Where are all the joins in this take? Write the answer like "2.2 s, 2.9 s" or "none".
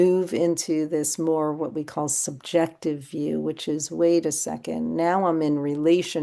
none